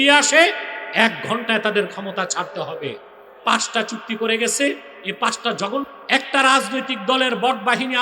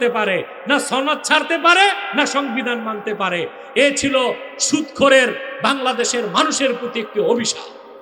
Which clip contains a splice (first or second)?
first